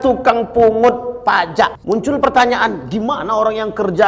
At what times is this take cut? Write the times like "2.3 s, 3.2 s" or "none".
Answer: 1.8 s